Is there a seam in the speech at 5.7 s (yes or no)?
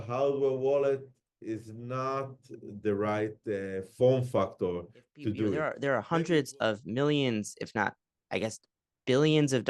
yes